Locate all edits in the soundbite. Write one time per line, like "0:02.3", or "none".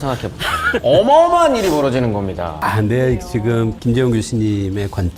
0:00.7
0:02.5